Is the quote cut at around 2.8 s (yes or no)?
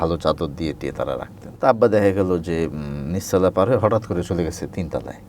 no